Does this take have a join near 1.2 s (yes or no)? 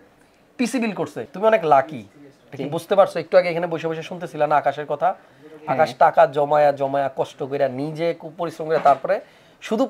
yes